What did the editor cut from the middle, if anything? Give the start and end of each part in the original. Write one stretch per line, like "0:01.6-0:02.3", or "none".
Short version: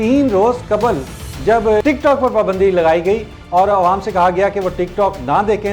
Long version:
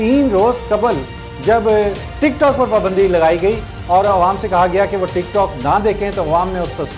0:01.8-0:02.2